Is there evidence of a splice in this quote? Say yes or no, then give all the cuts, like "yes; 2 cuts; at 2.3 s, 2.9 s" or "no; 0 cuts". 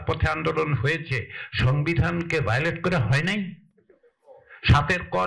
no; 0 cuts